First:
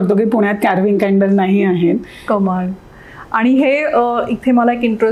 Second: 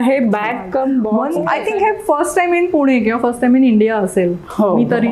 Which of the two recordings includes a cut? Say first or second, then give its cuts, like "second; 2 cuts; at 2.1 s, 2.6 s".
second; 1 cut; at 1.2 s